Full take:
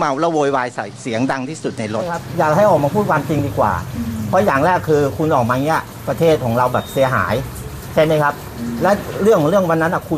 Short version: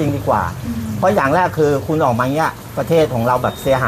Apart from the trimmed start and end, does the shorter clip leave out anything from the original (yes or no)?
no